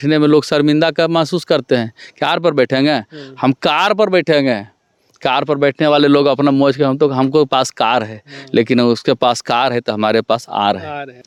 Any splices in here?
no; 0 cuts

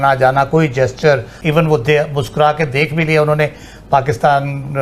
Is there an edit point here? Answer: yes; 1 cut; at 1.3 s

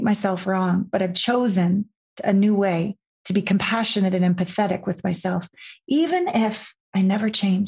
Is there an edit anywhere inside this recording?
no; 0 cuts

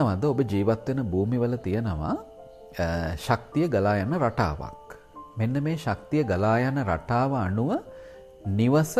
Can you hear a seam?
no; 0 cuts

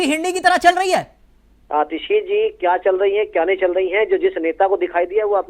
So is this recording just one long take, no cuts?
yes; 0 cuts

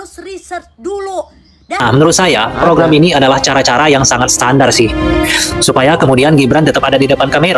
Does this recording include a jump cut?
yes; 1 cut; at 1.8 s

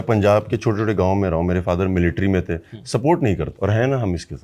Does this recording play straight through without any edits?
no; 1 cut; at 3.5 s

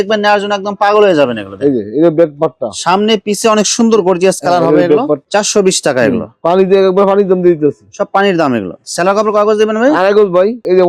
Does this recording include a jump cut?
no; 0 cuts

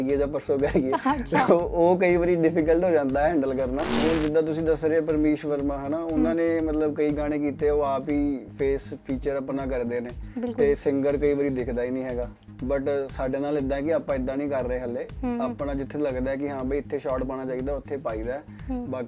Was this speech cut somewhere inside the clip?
yes; 1 cut; at 3.9 s

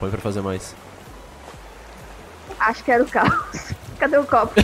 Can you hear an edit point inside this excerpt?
yes; 1 cut; at 1.0 s

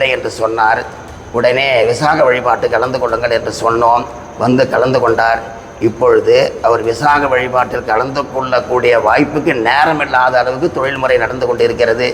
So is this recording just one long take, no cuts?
yes; 0 cuts

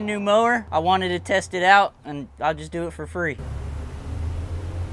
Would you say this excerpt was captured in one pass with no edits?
yes; 0 cuts

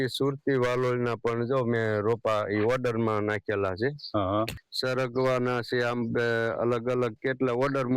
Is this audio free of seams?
no; 1 cut; at 4.6 s

